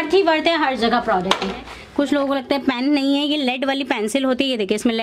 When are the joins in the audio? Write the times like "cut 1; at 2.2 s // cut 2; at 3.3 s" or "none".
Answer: cut 1; at 1.7 s